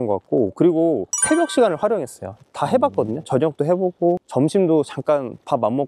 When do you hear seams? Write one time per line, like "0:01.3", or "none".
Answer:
none